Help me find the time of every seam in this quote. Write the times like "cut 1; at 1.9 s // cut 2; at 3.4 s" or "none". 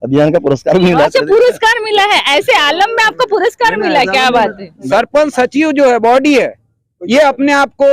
cut 1; at 4.7 s